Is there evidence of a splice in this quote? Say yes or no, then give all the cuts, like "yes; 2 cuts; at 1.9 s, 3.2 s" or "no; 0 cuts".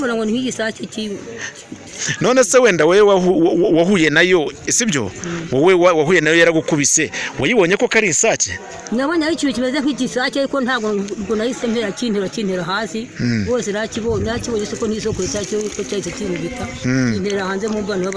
no; 0 cuts